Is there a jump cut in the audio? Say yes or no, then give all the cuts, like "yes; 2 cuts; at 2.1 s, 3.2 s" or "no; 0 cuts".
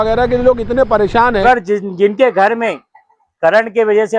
yes; 1 cut; at 1.4 s